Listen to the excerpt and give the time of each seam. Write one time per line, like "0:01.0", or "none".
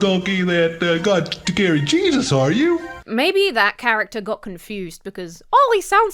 0:02.9